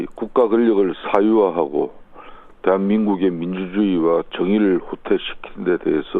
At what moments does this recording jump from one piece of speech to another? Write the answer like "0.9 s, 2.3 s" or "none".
4.0 s